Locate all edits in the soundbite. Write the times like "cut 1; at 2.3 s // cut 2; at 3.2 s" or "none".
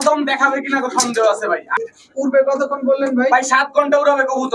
cut 1; at 1.8 s